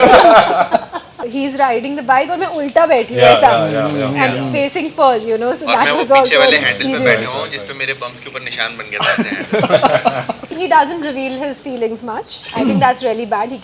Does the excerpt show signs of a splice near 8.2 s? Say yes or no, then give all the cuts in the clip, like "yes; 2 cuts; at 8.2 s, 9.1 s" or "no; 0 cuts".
no; 2 cuts; at 1.2 s, 10.5 s